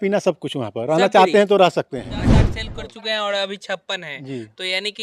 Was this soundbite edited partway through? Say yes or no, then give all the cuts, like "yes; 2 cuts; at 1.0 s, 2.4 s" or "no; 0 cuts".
yes; 1 cut; at 2.6 s